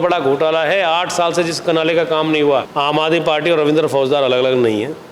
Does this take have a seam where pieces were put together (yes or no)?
yes